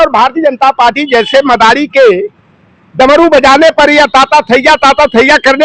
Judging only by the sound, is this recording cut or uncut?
uncut